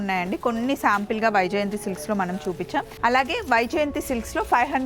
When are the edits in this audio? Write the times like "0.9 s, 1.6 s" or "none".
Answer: 2.9 s

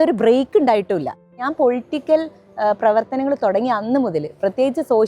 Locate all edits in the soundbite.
1.3 s

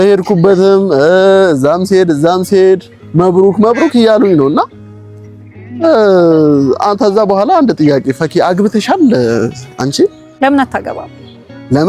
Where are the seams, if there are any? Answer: 10.3 s

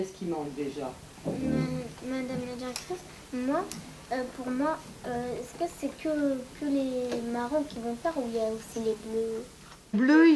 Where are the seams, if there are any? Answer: none

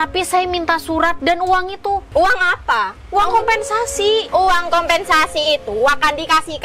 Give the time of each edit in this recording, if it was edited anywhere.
1.2 s, 2.1 s, 4.3 s

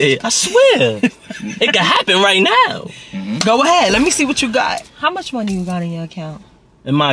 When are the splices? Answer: 4.8 s

